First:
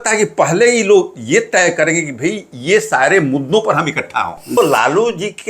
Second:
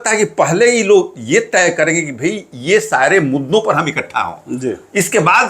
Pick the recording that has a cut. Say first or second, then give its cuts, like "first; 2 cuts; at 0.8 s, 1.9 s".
first; 1 cut; at 4.6 s